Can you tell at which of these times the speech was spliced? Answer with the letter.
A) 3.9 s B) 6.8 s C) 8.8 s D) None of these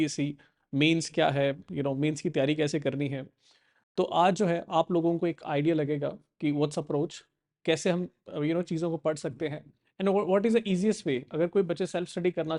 D